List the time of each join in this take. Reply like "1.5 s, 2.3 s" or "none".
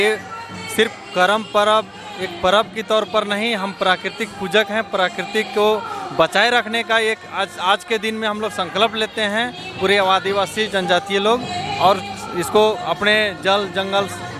none